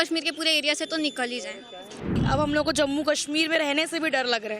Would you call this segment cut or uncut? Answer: cut